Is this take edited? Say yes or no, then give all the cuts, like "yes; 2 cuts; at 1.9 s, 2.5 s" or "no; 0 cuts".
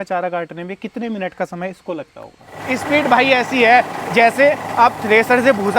yes; 1 cut; at 2.5 s